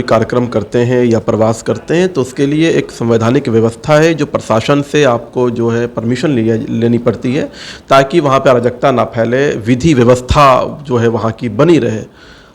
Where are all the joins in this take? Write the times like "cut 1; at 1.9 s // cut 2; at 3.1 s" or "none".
none